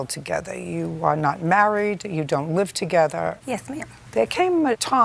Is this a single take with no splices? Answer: no; 1 cut; at 3.6 s

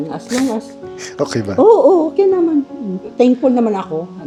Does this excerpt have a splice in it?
no; 0 cuts

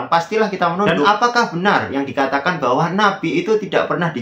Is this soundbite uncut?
no; 1 cut; at 1.0 s

